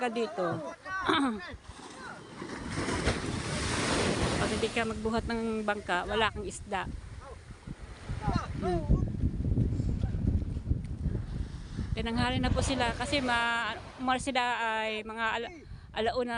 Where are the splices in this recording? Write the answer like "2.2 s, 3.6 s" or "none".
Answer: none